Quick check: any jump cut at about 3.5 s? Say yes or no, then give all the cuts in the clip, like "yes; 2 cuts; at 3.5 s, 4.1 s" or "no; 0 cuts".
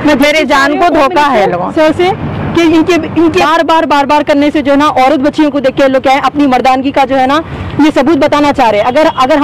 yes; 1 cut; at 3.5 s